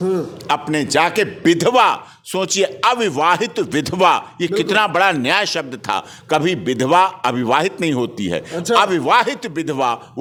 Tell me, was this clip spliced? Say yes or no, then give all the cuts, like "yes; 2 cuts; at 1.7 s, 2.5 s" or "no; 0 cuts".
no; 0 cuts